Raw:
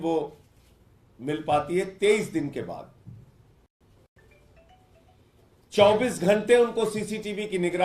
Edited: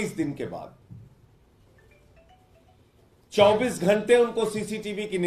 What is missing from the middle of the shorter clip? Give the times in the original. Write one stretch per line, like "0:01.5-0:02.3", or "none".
0:03.8-0:04.1